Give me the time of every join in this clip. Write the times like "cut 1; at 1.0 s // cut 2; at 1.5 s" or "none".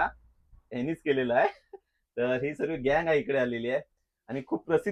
none